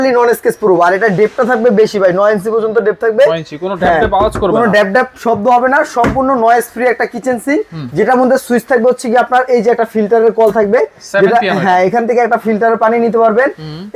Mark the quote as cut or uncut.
uncut